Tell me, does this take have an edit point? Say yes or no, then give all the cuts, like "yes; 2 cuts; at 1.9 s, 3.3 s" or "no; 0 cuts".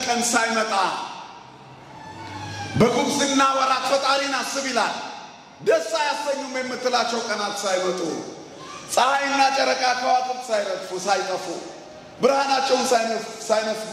no; 0 cuts